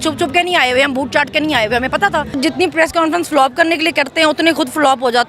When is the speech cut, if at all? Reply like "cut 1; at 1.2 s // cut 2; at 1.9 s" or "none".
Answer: cut 1; at 2.4 s